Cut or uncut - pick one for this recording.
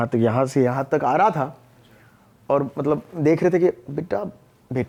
uncut